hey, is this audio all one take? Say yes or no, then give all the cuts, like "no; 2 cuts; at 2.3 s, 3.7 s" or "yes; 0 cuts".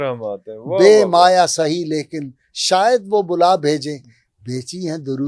yes; 0 cuts